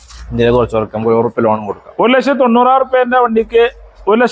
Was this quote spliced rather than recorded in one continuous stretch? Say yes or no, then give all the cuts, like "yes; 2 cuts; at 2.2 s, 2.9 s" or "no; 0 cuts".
no; 0 cuts